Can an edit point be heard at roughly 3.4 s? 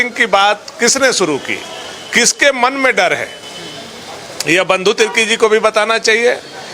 no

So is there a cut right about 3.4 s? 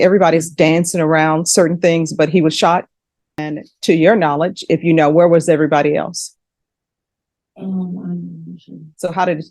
yes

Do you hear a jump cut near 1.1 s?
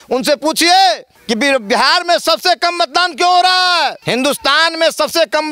yes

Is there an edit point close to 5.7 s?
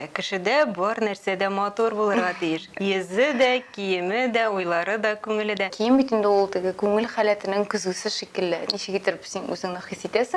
yes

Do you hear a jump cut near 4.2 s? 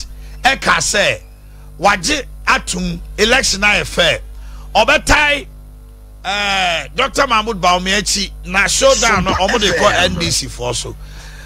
no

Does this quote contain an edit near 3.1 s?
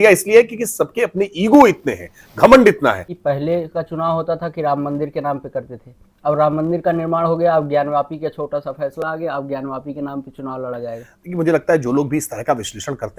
yes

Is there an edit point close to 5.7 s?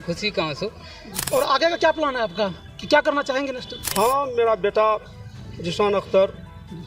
no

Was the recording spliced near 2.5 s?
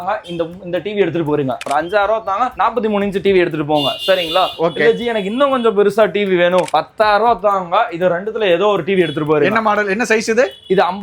yes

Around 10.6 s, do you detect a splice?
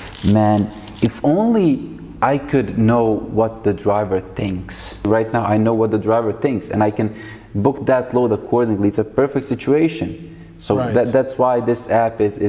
no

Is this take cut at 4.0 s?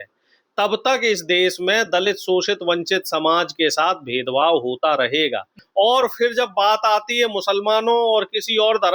no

